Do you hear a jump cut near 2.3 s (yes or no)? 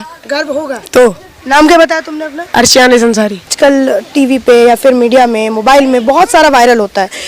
no